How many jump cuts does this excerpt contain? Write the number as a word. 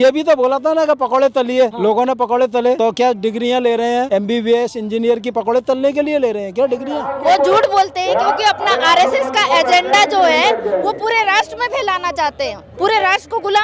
four